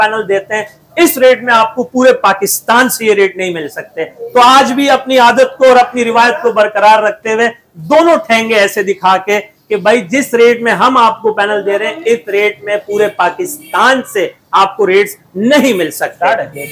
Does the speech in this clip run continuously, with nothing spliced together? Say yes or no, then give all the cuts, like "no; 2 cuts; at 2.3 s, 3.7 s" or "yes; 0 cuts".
yes; 0 cuts